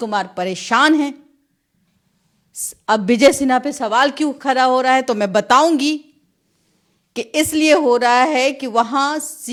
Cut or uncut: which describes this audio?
uncut